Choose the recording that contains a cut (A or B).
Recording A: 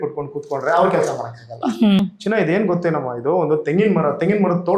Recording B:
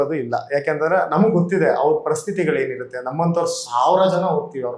A